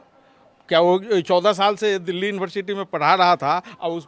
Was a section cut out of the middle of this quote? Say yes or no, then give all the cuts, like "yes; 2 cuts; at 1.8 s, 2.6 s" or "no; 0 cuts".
no; 0 cuts